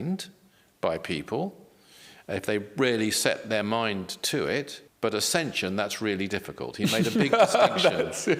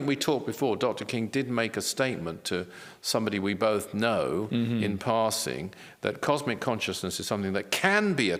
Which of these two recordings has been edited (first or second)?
first